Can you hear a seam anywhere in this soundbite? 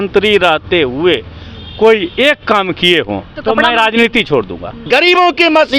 yes; 2 cuts; at 3.3 s, 4.7 s

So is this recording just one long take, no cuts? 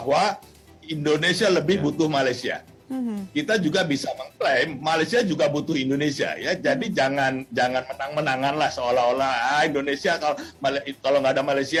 yes; 0 cuts

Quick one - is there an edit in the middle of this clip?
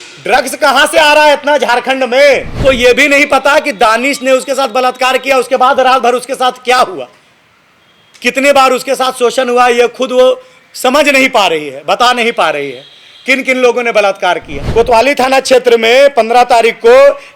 yes; 2 cuts; at 2.5 s, 14.5 s

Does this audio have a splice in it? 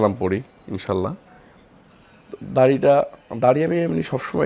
no; 0 cuts

